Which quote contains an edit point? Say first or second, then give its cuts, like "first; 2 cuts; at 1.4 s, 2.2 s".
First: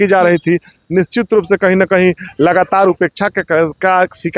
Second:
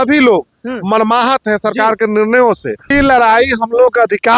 second; 1 cut; at 2.9 s